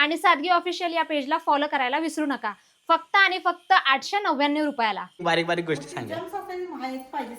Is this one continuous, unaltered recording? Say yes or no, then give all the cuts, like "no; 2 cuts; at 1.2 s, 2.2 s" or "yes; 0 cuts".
no; 1 cut; at 5.2 s